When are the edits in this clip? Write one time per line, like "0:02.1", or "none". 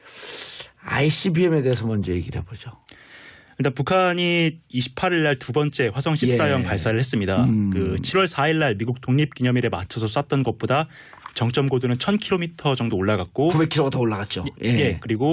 0:04.2